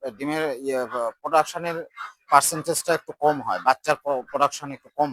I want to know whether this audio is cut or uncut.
uncut